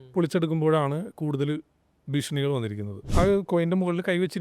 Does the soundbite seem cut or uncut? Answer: cut